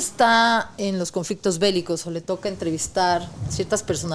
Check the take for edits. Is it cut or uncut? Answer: uncut